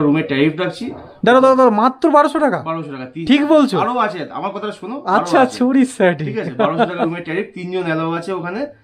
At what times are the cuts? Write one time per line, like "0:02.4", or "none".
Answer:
none